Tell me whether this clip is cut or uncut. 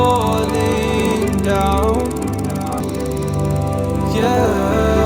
uncut